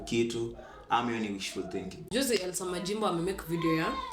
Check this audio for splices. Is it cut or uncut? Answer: cut